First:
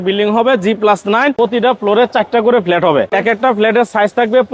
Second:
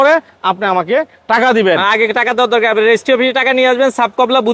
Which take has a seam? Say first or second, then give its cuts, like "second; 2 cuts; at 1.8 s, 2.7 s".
first; 2 cuts; at 1.4 s, 3.1 s